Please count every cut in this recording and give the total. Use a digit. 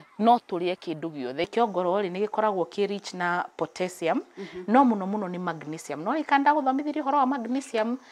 1